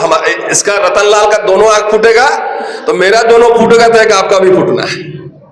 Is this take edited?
no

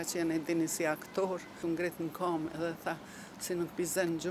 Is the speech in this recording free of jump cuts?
no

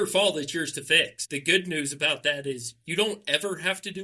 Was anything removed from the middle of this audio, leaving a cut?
yes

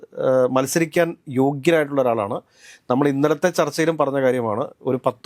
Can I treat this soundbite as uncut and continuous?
yes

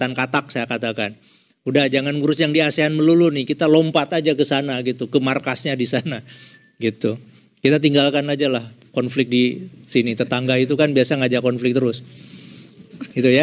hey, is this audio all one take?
yes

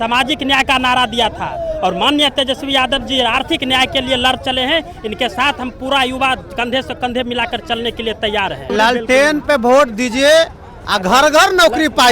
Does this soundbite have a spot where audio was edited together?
yes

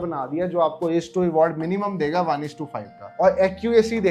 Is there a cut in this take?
no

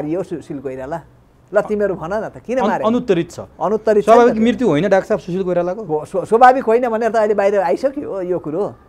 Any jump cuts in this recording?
no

